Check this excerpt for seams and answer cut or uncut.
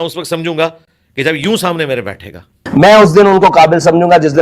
cut